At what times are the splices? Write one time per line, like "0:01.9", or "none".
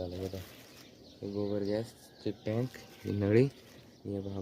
0:02.9